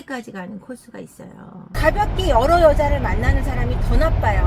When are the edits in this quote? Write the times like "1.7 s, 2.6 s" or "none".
1.7 s